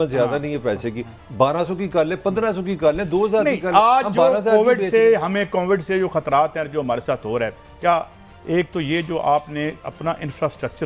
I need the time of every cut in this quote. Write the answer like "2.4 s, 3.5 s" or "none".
none